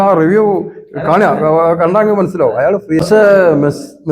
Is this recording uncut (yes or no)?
no